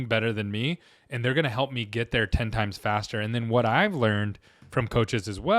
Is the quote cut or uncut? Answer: uncut